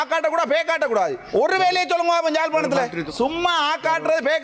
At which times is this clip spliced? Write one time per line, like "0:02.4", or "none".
0:01.2
0:03.0